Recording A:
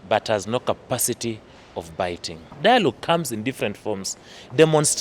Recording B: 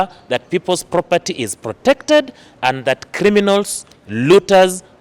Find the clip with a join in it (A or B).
A